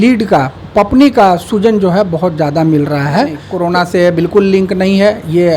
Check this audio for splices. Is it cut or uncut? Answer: cut